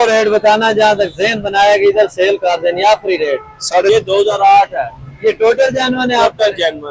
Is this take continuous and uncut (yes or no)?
no